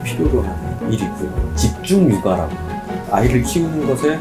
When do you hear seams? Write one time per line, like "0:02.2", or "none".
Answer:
0:01.5

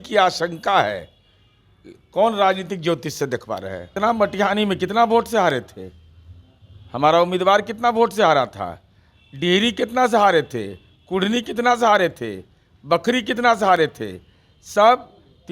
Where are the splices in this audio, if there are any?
0:03.9

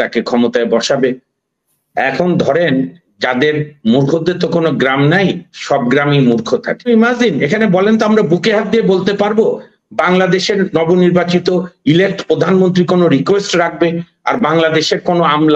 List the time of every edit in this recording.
0:06.9

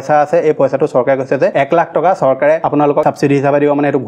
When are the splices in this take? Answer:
0:03.0

